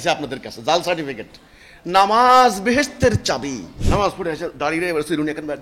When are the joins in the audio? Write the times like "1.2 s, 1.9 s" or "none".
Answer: 3.7 s